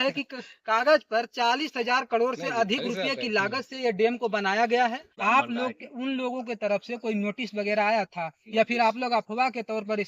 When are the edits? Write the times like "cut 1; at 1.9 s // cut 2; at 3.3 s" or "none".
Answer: cut 1; at 5.1 s

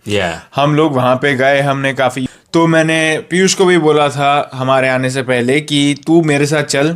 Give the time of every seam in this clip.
cut 1; at 2.2 s

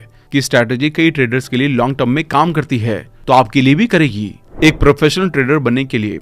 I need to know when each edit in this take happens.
cut 1; at 4.4 s

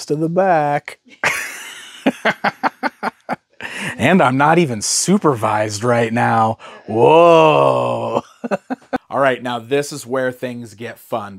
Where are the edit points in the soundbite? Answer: none

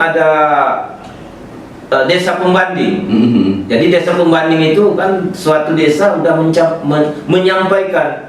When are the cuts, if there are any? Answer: none

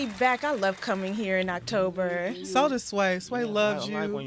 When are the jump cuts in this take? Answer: cut 1; at 1.7 s

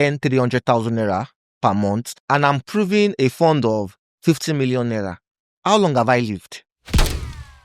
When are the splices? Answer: cut 1; at 2.1 s

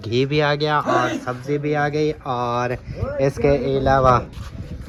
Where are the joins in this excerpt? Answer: none

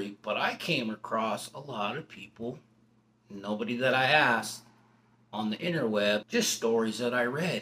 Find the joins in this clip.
cut 1; at 6.3 s

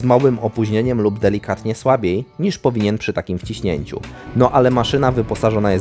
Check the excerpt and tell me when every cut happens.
none

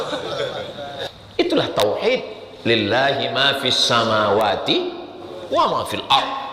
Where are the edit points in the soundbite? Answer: cut 1; at 1.0 s

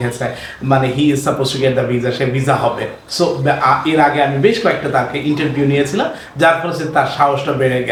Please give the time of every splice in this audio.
none

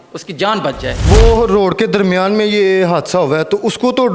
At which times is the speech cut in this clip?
cut 1; at 1.0 s

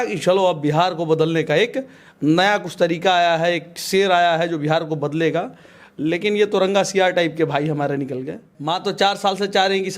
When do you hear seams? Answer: cut 1; at 8.5 s

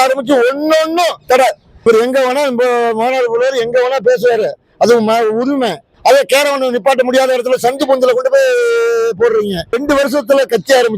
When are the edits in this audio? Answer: cut 1; at 1.9 s // cut 2; at 5.9 s // cut 3; at 9.7 s

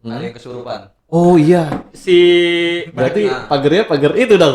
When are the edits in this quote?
cut 1; at 2.8 s

